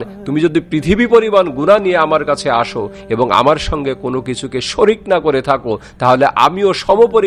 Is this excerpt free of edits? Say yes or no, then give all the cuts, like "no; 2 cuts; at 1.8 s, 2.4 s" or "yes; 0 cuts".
yes; 0 cuts